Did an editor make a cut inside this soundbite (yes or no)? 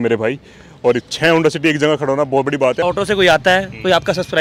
yes